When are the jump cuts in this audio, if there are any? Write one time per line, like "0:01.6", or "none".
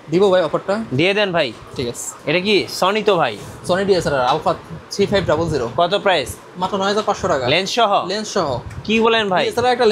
none